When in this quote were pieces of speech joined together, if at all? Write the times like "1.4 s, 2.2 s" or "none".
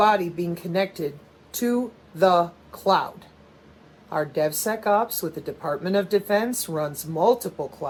none